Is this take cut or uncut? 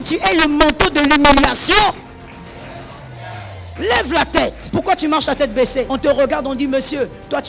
cut